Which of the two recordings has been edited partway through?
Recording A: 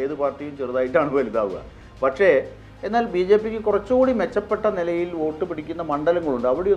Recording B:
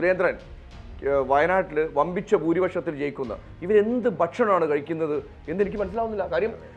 A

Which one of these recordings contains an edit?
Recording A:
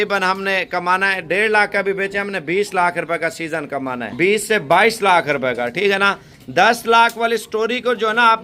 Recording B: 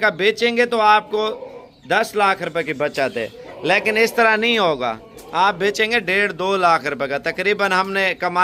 A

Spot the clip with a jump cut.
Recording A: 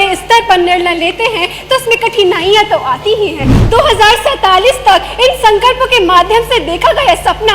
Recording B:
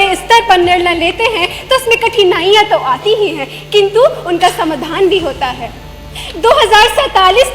A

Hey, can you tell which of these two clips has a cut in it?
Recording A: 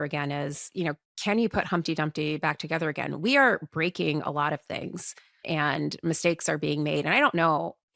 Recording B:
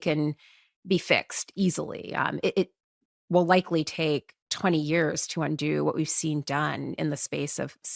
A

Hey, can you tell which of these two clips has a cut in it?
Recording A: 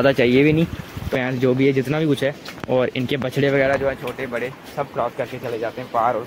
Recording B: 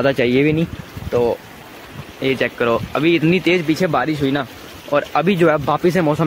A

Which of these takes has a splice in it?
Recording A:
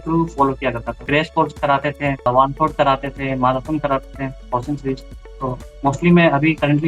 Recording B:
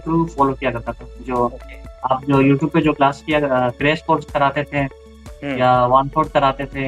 A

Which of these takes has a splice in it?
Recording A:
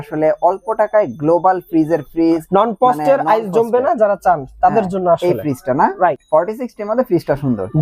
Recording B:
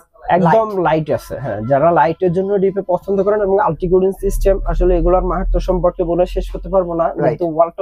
A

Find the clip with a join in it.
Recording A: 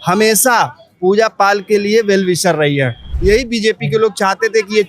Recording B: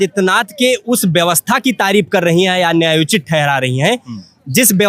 A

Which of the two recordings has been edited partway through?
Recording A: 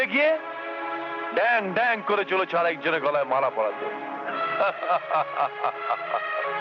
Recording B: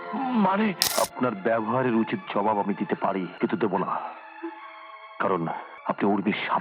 B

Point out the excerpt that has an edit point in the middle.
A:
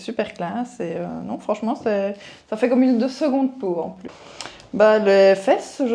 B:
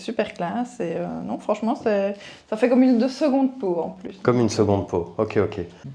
A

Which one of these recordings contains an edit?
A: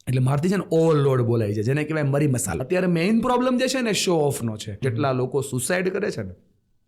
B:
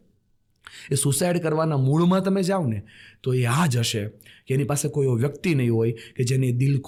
A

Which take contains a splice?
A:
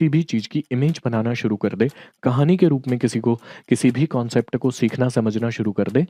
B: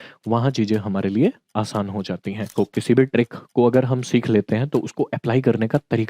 B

